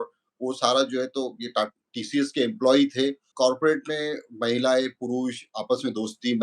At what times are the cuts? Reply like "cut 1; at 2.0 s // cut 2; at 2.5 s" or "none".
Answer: cut 1; at 3.3 s